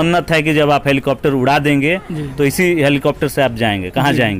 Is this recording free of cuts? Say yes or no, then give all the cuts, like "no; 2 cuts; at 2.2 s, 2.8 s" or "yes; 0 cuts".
yes; 0 cuts